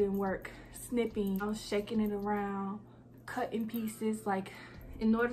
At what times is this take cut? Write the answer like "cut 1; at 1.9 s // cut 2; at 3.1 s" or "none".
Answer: cut 1; at 1.4 s

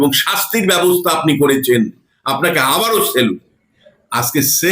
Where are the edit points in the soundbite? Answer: cut 1; at 3.4 s

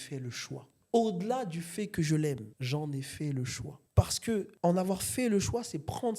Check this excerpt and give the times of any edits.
cut 1; at 3.8 s

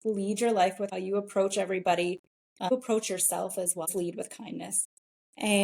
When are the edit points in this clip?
cut 1; at 0.9 s // cut 2; at 2.7 s // cut 3; at 3.9 s

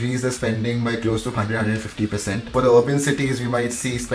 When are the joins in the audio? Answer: cut 1; at 2.5 s

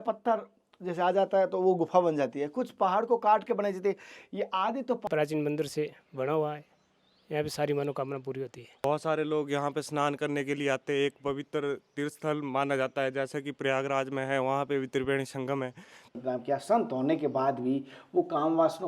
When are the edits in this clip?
cut 1; at 5.1 s // cut 2; at 8.8 s // cut 3; at 16.1 s

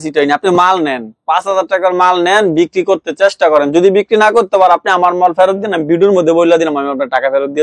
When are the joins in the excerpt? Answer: none

